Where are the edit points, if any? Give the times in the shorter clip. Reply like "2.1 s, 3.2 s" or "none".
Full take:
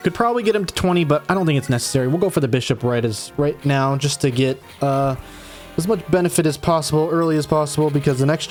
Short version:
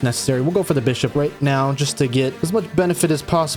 1.1 s, 2.4 s